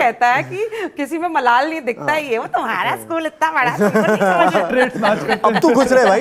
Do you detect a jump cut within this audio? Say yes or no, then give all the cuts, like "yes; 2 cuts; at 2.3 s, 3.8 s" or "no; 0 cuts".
no; 0 cuts